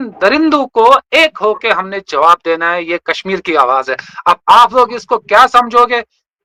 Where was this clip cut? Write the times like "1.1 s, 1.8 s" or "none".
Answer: none